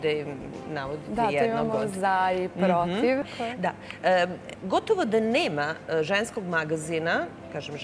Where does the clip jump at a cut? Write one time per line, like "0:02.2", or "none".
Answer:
none